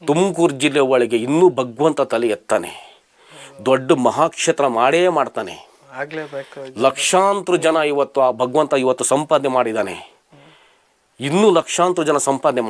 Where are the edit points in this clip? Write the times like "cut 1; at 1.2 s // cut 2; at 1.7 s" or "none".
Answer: none

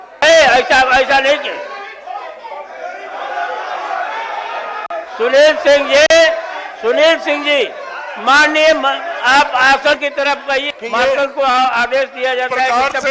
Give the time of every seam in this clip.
none

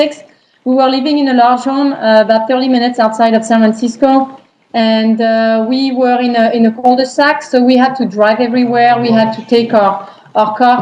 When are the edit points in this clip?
cut 1; at 6.4 s

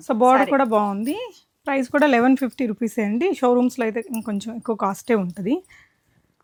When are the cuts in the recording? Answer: none

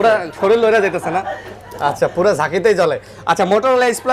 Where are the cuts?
none

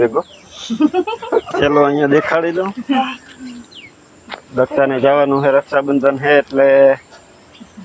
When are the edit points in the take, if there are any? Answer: none

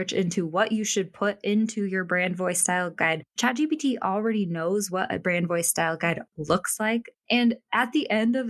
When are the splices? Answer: none

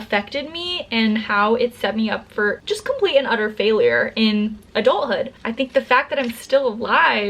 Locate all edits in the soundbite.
cut 1; at 5.4 s

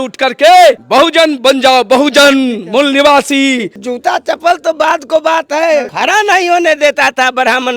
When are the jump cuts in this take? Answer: cut 1; at 0.8 s // cut 2; at 3.8 s // cut 3; at 5.9 s

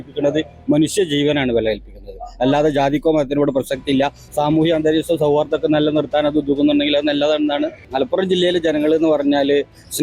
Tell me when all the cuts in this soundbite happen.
cut 1; at 4.2 s // cut 2; at 7.8 s

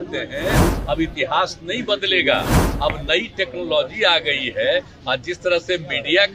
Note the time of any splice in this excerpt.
cut 1; at 2.6 s

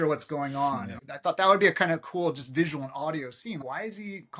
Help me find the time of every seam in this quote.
none

